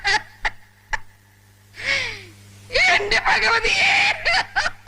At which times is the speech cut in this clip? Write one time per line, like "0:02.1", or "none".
none